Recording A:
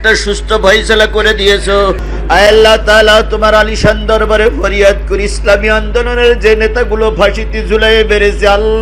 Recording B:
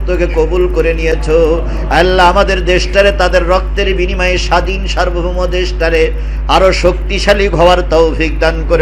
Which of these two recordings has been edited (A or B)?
A